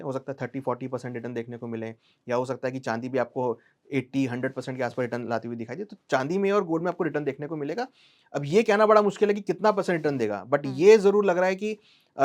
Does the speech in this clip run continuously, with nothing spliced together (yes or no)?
yes